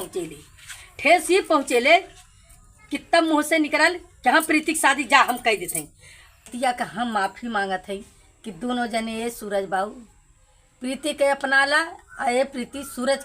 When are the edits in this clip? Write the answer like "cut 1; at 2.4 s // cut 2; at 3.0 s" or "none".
cut 1; at 6.5 s